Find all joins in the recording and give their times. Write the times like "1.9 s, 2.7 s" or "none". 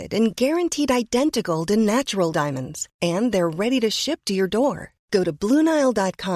none